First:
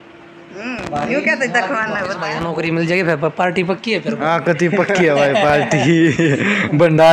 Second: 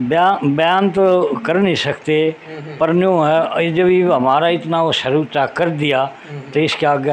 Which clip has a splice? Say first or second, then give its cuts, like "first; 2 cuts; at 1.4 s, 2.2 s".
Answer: first; 1 cut; at 2.2 s